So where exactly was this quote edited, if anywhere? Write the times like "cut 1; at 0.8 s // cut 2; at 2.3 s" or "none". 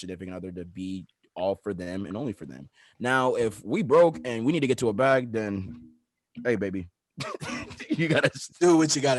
none